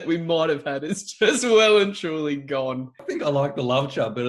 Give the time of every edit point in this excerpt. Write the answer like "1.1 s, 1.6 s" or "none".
3.1 s